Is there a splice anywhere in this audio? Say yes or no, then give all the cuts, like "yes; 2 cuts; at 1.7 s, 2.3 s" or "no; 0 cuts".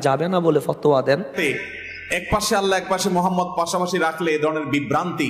yes; 1 cut; at 1.3 s